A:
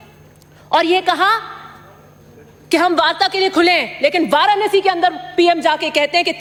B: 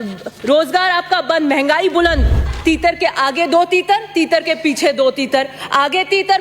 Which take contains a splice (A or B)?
B